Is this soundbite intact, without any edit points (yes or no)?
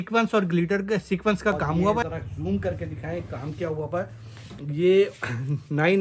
no